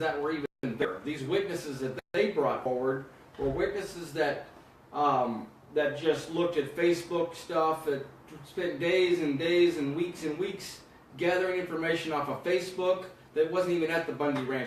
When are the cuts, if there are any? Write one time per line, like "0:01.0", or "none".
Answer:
0:04.3